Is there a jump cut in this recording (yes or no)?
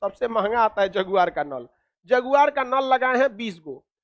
no